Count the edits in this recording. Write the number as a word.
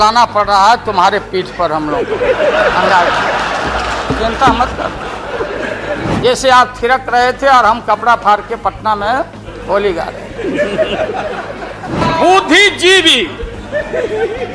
two